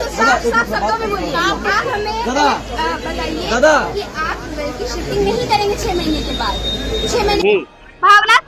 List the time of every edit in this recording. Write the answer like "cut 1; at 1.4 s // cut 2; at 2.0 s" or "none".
cut 1; at 1.6 s // cut 2; at 7.4 s